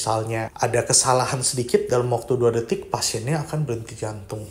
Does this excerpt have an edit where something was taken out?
no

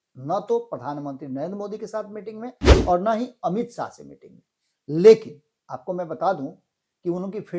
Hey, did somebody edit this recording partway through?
no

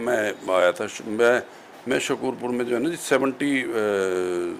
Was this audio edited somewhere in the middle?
no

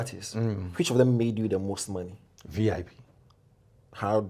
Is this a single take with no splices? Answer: yes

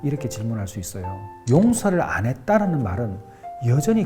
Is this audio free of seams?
no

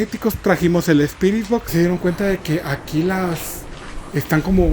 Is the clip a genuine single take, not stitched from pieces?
no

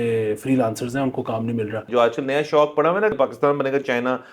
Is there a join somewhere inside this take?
yes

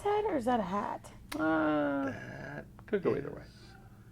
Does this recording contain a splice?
no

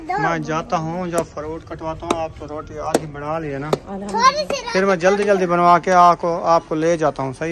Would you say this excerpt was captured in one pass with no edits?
yes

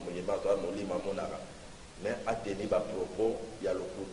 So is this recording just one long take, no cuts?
yes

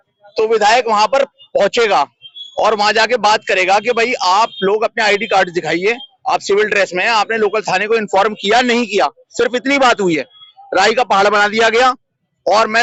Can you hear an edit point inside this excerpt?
no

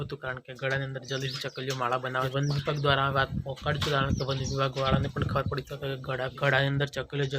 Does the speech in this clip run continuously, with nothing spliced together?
no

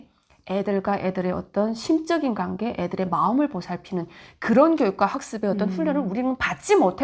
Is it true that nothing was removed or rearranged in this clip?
yes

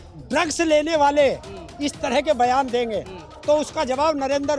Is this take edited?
no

